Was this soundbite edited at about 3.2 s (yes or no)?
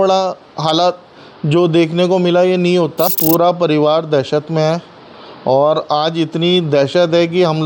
yes